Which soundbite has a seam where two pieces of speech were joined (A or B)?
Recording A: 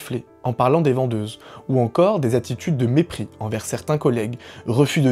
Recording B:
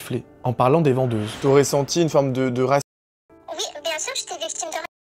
B